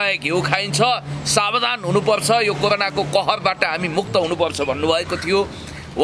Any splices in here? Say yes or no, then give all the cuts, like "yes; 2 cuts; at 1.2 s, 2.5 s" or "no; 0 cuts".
no; 0 cuts